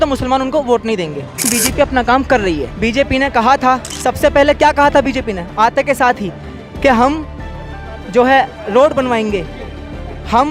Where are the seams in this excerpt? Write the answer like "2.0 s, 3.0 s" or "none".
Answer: 1.5 s, 2.7 s, 3.9 s